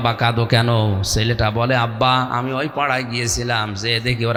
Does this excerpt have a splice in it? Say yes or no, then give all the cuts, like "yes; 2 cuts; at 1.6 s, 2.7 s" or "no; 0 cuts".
no; 0 cuts